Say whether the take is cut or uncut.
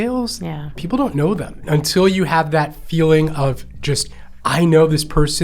cut